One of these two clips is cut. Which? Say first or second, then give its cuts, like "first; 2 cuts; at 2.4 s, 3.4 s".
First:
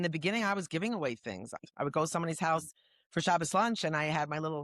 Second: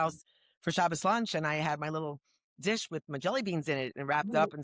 first; 1 cut; at 1.6 s